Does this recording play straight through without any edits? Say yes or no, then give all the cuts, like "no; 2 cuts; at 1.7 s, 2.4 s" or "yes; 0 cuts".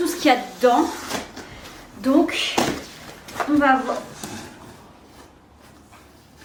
yes; 0 cuts